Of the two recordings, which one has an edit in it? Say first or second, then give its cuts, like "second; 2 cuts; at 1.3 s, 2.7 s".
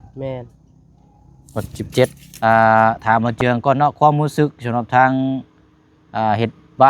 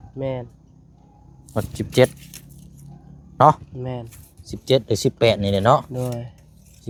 first; 1 cut; at 2.2 s